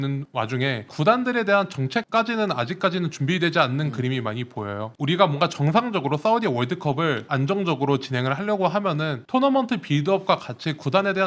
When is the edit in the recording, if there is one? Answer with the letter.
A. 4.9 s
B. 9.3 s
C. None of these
C